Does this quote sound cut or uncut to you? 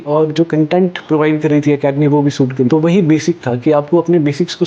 cut